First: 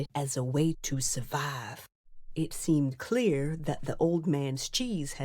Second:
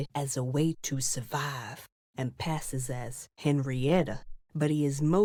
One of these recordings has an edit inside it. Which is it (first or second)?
first